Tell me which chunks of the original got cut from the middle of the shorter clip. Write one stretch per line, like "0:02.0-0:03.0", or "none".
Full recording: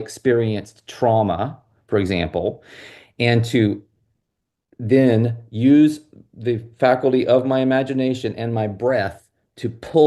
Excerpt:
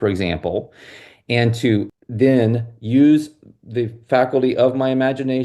0:03.9-0:04.7